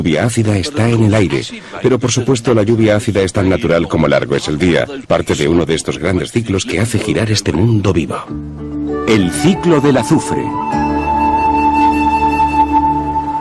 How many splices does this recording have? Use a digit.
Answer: 0